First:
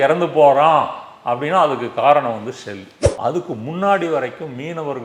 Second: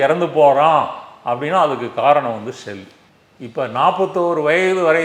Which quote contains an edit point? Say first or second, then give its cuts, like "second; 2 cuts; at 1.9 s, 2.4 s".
first; 1 cut; at 3.0 s